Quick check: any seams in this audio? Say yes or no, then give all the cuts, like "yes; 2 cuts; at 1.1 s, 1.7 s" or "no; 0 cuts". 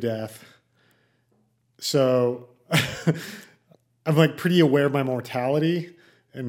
no; 0 cuts